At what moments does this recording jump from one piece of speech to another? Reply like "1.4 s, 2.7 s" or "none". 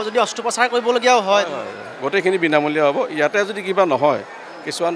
none